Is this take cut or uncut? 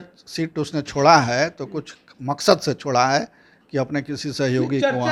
uncut